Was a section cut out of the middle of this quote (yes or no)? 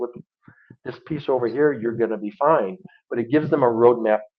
no